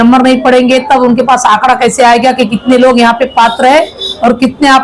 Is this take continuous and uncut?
yes; 0 cuts

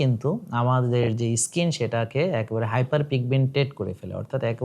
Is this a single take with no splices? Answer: yes; 0 cuts

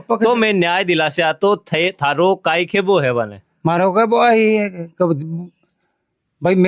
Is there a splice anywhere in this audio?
no; 0 cuts

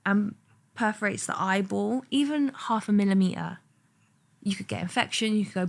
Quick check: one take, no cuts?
yes; 0 cuts

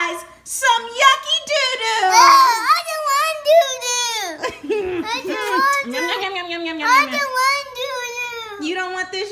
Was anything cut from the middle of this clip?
no; 0 cuts

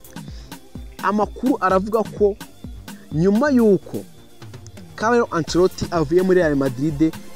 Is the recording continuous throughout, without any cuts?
no; 1 cut; at 1.0 s

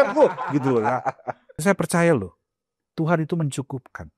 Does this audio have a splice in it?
yes; 1 cut; at 1.6 s

